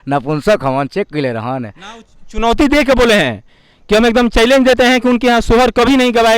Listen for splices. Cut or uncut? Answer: uncut